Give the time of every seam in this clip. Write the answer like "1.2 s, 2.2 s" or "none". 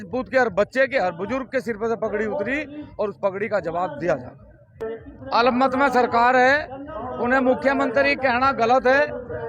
4.8 s

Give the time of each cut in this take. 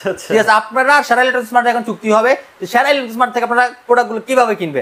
none

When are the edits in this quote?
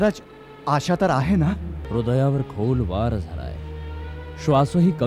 1.7 s

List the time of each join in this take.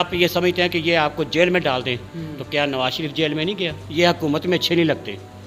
3.8 s

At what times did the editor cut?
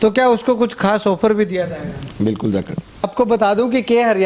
3.1 s

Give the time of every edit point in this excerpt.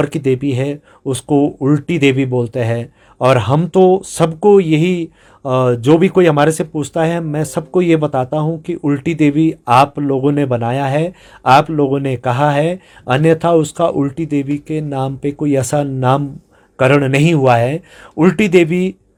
none

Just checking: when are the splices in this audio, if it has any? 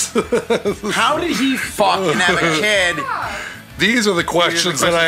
3.7 s

